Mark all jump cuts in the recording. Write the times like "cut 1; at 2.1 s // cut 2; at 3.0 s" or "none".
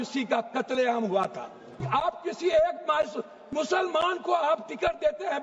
cut 1; at 1.8 s